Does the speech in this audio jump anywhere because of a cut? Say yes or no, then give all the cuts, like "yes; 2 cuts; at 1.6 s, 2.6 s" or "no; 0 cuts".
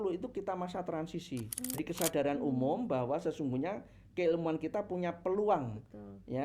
yes; 1 cut; at 1.8 s